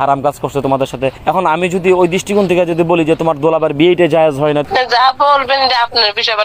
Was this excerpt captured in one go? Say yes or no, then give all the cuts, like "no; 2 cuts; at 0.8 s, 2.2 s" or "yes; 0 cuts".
no; 2 cuts; at 1.2 s, 4.7 s